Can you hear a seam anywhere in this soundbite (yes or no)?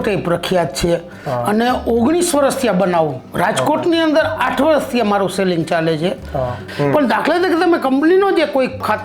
yes